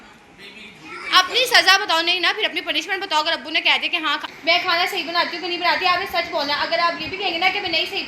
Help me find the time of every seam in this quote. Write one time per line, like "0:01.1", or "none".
0:04.2